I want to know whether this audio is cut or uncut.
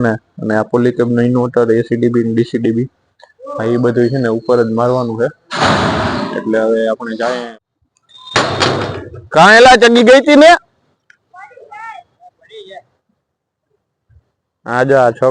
cut